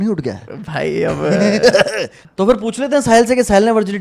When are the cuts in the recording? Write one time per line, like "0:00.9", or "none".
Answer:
0:02.2